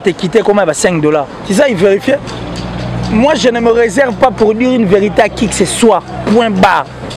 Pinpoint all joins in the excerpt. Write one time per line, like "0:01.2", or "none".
0:01.4